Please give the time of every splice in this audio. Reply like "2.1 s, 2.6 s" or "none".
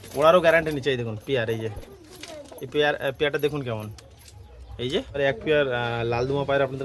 5.2 s